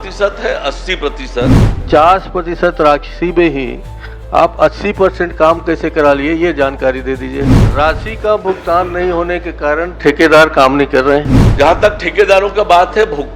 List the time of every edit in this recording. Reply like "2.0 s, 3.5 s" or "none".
1.7 s, 7.6 s, 11.4 s